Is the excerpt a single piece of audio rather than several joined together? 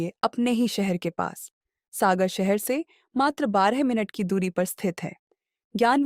yes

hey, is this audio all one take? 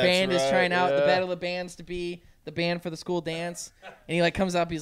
yes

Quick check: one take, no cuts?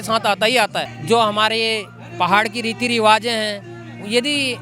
no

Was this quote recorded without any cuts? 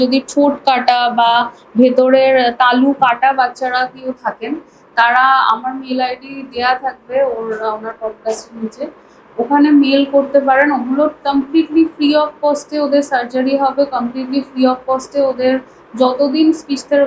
yes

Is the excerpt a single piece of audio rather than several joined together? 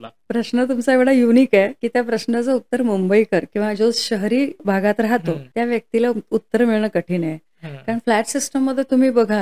no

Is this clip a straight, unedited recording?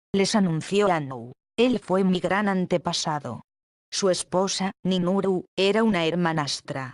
no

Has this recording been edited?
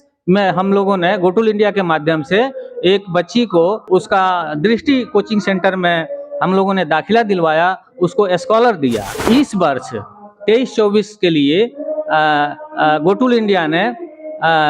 yes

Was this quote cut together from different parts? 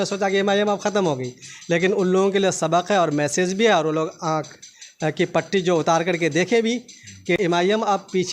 yes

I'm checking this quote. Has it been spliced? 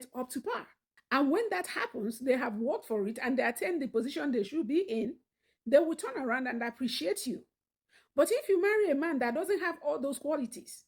no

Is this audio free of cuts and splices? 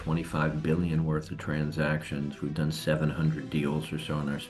yes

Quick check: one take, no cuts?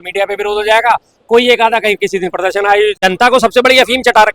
no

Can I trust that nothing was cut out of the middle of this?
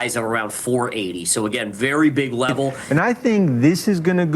no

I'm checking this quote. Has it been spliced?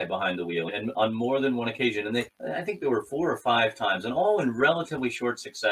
no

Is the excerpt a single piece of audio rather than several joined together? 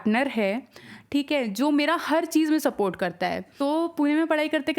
no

